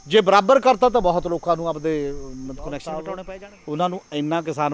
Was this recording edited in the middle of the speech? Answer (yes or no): yes